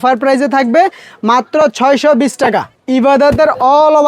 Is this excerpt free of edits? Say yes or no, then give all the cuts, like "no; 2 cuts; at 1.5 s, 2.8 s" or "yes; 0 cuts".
no; 1 cut; at 2.7 s